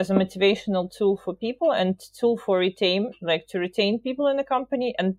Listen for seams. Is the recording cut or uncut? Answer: uncut